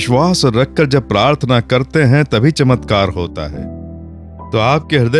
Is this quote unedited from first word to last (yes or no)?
yes